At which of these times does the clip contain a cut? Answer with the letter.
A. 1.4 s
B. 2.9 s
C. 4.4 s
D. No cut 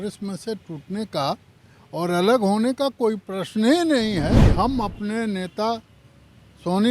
C